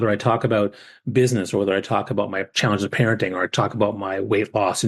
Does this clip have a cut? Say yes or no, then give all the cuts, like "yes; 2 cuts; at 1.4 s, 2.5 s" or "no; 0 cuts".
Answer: yes; 1 cut; at 2.5 s